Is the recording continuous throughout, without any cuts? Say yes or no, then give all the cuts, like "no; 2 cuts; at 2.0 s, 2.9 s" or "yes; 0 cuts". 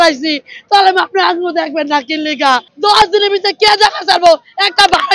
no; 1 cut; at 2.7 s